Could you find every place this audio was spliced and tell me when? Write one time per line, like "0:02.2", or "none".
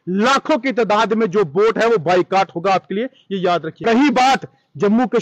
0:03.8